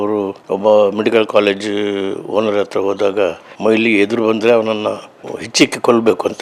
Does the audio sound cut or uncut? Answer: uncut